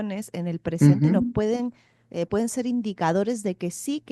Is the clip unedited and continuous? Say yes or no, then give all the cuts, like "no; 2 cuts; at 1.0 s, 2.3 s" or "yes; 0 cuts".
yes; 0 cuts